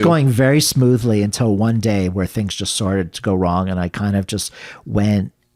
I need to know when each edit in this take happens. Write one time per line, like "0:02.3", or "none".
none